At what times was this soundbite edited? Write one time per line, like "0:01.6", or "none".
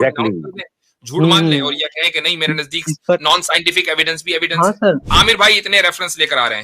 0:05.1